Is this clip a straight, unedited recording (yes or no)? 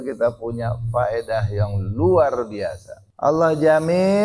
no